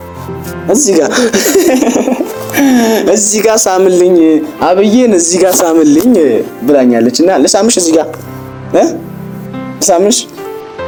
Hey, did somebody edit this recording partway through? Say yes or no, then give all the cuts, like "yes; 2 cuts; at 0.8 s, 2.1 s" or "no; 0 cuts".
no; 0 cuts